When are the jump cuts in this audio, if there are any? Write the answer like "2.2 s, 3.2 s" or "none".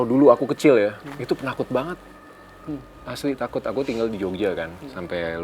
none